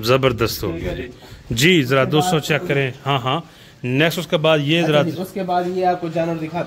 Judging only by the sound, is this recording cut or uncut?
uncut